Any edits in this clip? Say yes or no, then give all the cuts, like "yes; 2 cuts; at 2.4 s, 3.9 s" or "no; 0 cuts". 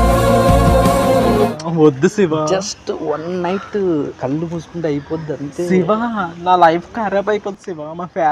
yes; 1 cut; at 1.3 s